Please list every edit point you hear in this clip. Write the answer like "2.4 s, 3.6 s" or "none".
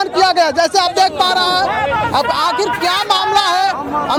none